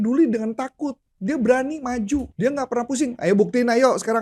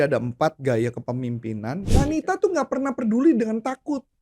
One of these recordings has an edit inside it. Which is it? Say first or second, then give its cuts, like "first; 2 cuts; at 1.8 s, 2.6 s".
second; 1 cut; at 1.9 s